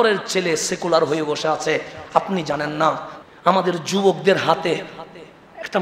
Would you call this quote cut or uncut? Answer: cut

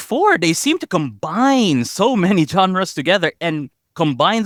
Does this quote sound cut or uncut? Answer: uncut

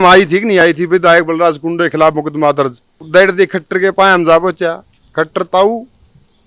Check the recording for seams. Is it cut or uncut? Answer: cut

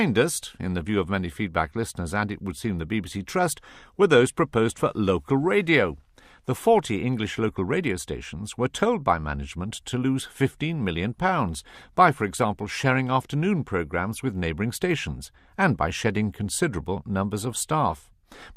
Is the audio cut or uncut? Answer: uncut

